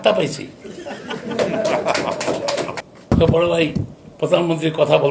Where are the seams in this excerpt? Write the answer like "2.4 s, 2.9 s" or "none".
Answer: 2.8 s